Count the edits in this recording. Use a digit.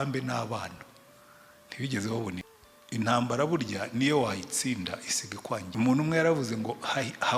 2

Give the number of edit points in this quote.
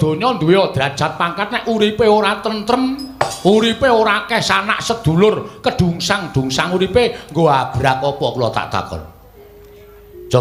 0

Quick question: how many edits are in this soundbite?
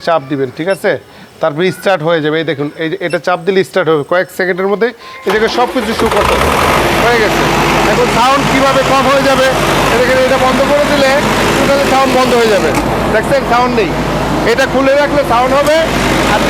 0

